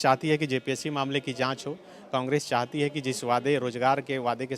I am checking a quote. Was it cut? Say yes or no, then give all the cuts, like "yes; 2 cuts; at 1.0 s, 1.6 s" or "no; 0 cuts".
no; 0 cuts